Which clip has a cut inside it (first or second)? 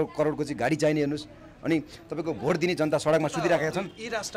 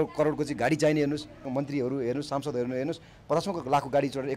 second